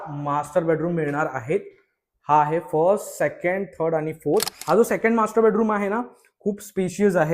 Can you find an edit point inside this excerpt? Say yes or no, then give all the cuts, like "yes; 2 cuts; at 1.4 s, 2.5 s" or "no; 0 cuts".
yes; 1 cut; at 4.5 s